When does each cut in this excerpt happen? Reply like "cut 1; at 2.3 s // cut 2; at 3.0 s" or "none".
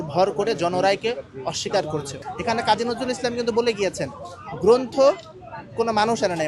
cut 1; at 2.1 s